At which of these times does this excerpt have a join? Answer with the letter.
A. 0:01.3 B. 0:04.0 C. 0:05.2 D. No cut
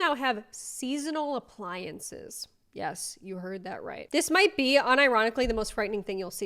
B